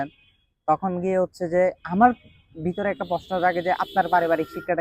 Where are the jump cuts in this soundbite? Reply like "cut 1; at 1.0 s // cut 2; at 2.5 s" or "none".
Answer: none